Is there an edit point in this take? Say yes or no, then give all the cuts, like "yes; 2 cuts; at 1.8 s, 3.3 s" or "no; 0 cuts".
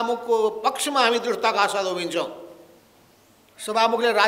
no; 0 cuts